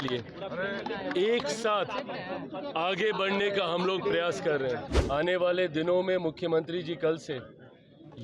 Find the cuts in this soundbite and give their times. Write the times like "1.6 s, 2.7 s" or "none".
4.9 s